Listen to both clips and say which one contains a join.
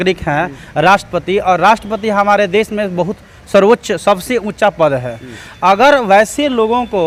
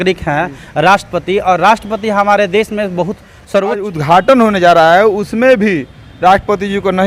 second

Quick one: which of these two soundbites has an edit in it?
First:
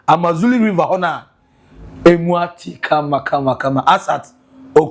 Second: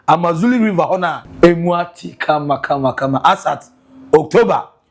second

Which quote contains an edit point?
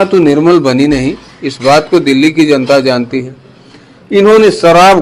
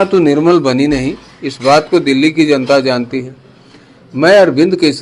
first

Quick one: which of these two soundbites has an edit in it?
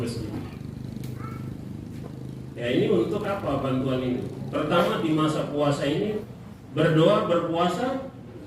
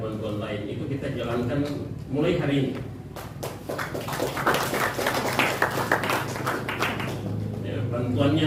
first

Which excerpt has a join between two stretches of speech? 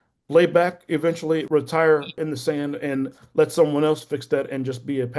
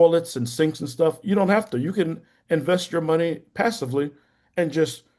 first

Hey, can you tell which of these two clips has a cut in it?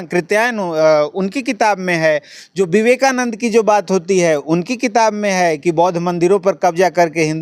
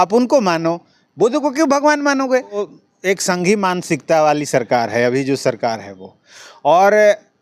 second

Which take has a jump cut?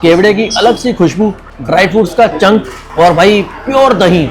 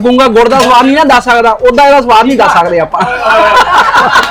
first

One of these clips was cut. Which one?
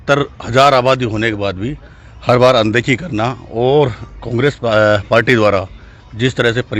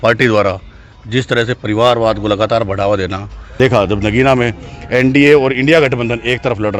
second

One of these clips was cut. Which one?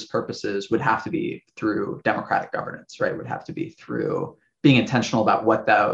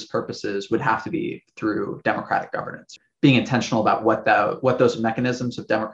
second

